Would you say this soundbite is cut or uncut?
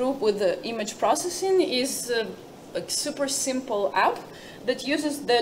uncut